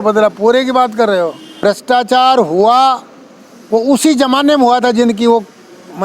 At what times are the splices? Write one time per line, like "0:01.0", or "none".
0:01.6